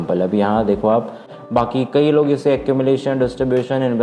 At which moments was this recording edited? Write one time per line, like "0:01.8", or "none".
0:01.3